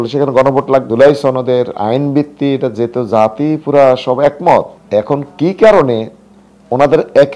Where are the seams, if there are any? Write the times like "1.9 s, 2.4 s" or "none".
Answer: 0.9 s, 4.8 s